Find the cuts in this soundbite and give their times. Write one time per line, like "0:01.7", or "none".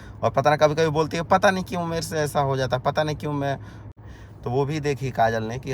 0:03.8